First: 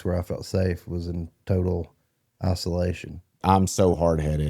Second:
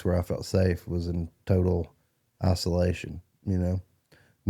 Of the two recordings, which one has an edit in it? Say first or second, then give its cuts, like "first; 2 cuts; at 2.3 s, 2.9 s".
first; 1 cut; at 3.4 s